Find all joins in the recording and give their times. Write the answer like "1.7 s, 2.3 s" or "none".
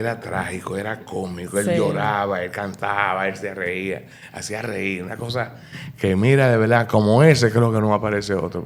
none